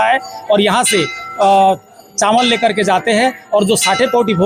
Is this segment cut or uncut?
uncut